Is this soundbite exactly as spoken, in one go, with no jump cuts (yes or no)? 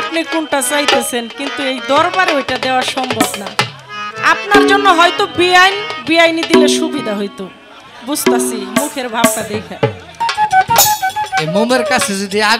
no